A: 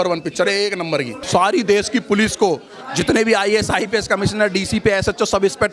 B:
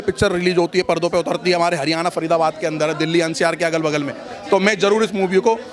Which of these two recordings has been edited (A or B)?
A